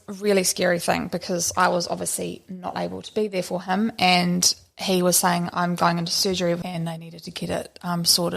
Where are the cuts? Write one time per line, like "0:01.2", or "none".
0:06.6

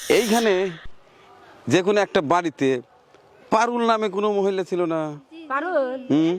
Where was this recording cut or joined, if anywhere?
none

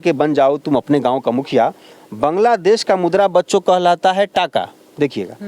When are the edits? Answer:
none

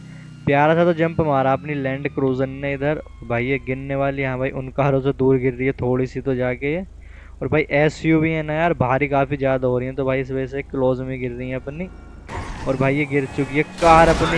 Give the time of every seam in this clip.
none

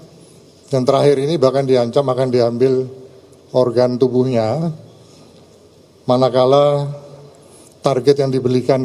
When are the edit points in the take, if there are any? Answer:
none

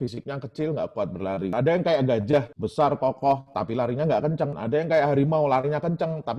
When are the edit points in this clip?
none

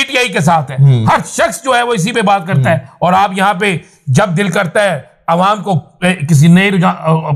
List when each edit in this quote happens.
none

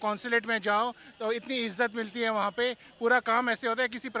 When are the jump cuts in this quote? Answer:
none

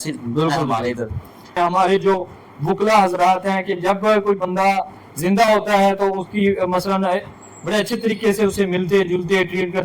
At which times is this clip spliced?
0:01.5

